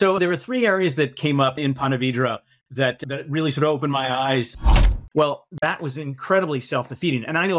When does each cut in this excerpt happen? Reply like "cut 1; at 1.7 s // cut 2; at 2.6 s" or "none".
cut 1; at 4.7 s